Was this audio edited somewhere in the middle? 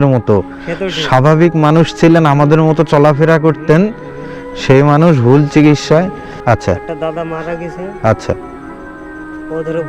yes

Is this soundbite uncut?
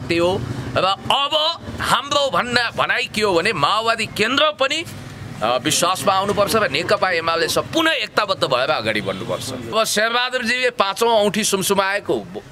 no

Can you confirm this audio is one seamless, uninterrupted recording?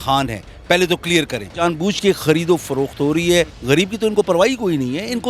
no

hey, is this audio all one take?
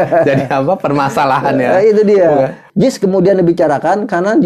no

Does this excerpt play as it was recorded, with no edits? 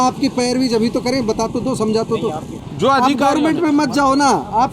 no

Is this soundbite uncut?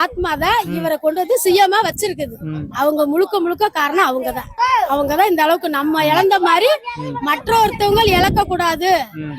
yes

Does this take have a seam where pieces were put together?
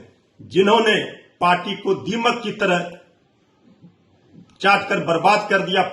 no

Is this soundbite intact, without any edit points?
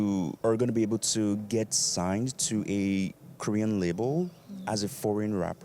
yes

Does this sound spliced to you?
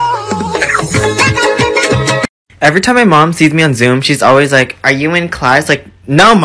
yes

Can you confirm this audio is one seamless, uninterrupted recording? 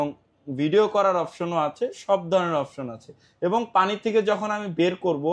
yes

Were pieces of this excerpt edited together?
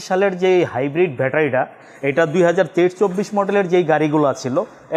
no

